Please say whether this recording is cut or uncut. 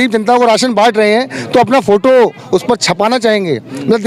uncut